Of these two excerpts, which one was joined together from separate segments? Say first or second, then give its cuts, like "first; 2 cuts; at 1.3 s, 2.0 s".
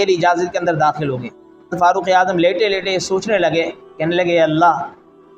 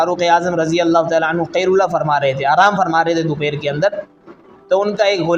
first; 2 cuts; at 1.7 s, 3.9 s